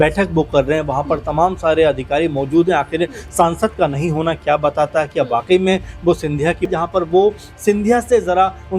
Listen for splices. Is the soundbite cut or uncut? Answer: cut